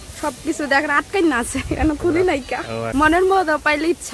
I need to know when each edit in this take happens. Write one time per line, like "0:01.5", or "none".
0:02.8